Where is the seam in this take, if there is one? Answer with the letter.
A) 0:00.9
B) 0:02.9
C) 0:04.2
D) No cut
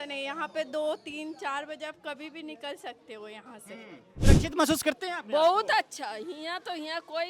C